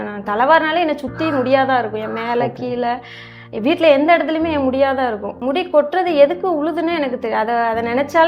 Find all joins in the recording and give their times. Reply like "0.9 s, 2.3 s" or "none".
5.4 s